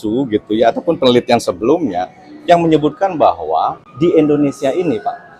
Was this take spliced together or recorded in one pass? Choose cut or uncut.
cut